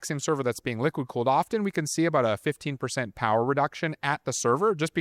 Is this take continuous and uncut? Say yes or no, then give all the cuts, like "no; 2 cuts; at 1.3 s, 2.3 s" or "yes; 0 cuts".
yes; 0 cuts